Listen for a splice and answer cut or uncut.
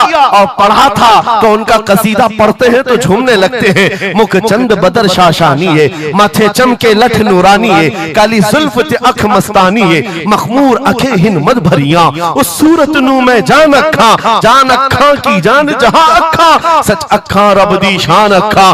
uncut